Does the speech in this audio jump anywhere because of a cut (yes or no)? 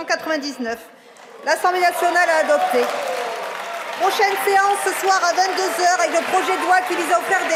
no